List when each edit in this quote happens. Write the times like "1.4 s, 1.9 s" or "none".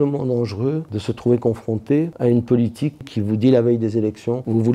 0.9 s, 2.1 s, 3.0 s